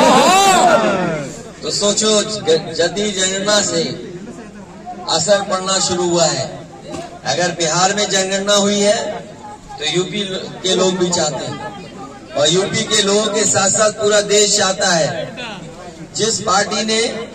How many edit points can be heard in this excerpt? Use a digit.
0